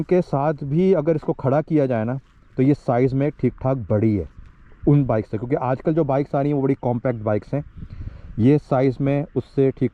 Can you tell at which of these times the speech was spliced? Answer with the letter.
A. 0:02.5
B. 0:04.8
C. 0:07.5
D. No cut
D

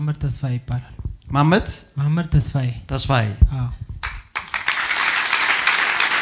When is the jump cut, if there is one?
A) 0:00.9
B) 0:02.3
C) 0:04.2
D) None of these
D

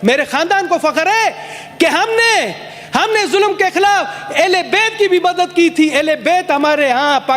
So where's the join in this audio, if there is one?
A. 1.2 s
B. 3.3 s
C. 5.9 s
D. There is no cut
D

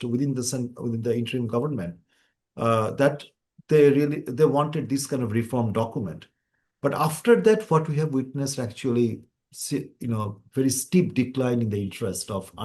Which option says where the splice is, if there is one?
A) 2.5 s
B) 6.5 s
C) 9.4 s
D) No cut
D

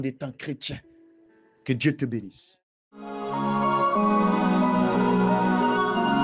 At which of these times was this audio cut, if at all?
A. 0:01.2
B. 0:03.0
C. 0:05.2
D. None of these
B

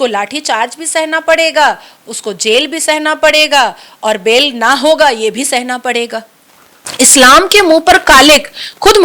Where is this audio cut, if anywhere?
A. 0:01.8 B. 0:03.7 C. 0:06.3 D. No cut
C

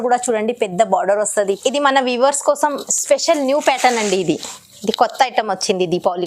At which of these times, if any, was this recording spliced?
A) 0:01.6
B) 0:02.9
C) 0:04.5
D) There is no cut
A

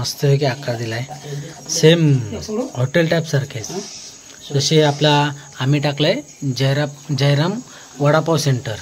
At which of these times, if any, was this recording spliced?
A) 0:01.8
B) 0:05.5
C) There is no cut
C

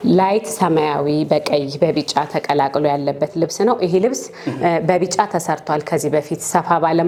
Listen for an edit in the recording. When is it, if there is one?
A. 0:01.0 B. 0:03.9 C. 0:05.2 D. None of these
D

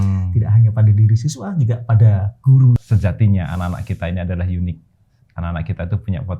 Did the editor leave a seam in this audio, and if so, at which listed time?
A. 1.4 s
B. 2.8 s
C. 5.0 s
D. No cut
B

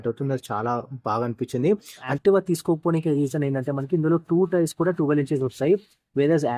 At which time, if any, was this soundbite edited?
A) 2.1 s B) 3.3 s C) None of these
A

